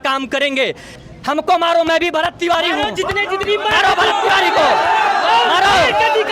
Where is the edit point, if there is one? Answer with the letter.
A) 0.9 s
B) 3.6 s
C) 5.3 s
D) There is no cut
A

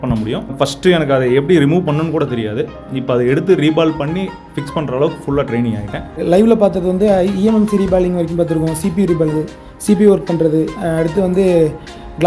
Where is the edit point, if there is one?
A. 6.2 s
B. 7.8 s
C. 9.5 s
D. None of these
A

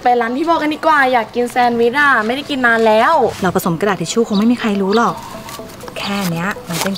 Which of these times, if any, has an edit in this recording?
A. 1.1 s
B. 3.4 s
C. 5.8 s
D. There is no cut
B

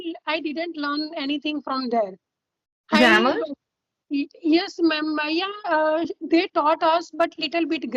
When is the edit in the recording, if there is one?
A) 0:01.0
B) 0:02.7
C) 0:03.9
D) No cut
D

